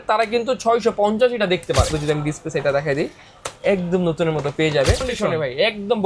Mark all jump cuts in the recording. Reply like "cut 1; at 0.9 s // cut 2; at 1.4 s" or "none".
cut 1; at 1.9 s // cut 2; at 5.1 s